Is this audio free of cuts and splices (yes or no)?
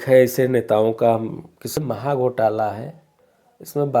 no